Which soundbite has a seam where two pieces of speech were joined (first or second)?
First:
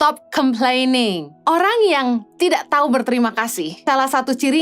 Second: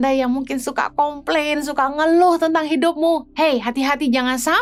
first